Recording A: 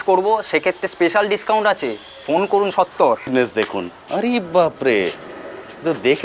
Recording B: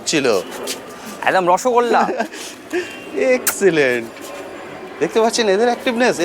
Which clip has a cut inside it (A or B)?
A